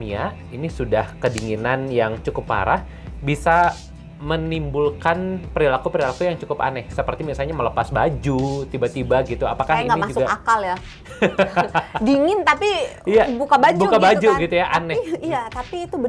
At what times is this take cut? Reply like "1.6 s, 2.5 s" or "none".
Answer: none